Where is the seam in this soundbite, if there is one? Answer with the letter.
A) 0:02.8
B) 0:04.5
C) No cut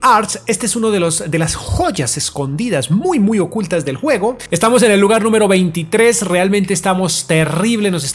B